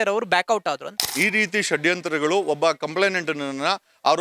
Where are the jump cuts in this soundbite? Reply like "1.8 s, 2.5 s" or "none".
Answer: 1.1 s

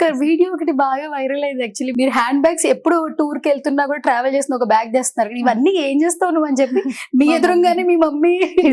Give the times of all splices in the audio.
1.9 s

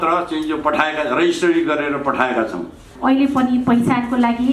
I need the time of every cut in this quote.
2.9 s

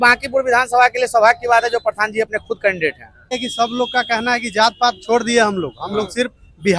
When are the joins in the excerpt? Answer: 3.4 s

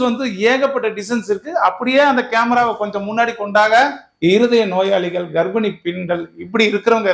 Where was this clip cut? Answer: 4.0 s

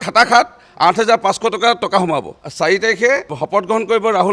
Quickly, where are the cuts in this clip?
2.4 s, 3.4 s

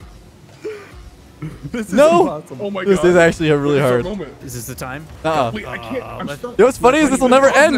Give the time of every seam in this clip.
none

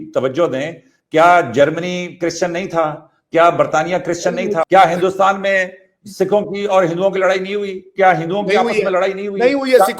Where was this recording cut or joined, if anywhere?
4.7 s

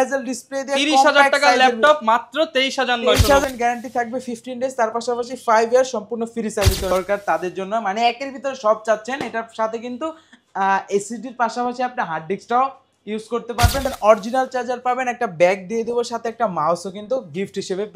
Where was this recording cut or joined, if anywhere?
3.4 s, 6.9 s, 13.9 s

